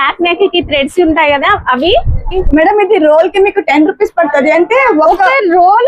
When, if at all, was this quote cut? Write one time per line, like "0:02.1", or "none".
0:02.3